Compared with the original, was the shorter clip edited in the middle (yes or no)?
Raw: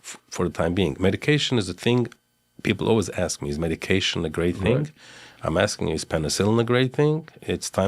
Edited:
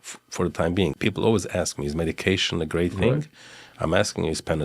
yes